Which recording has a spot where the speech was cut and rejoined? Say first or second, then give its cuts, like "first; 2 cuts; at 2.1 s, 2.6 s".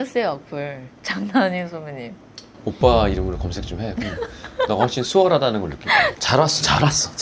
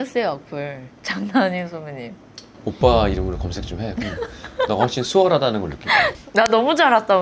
second; 1 cut; at 6.2 s